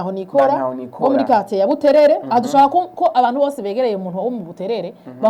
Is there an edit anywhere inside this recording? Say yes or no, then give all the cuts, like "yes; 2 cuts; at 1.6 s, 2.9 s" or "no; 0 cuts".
no; 0 cuts